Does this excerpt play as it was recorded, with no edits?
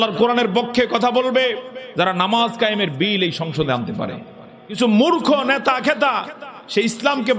no; 1 cut; at 4.8 s

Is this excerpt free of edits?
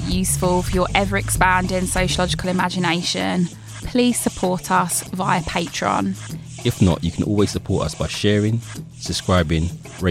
yes; 0 cuts

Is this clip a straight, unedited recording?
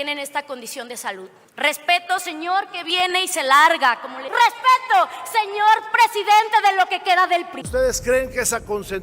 no; 3 cuts; at 1.4 s, 4.2 s, 7.6 s

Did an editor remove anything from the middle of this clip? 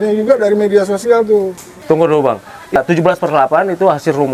yes; 2 cuts; at 1.7 s, 2.7 s

